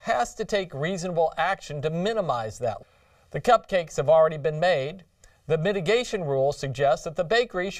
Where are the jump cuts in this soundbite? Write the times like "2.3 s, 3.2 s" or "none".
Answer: none